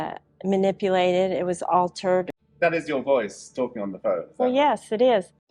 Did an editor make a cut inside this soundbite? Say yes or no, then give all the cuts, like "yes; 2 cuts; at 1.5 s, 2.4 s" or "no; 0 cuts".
yes; 1 cut; at 2.3 s